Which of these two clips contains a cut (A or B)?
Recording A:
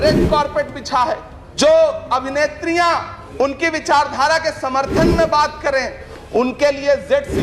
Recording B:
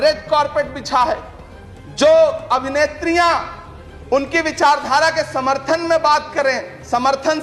A